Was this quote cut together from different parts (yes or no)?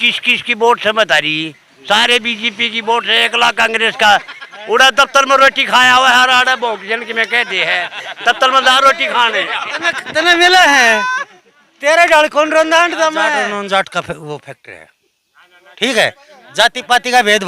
yes